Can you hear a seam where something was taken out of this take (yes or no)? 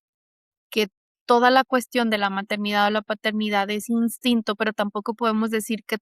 no